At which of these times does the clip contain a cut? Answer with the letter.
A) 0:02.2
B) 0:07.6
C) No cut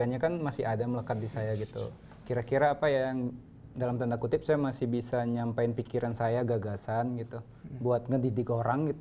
C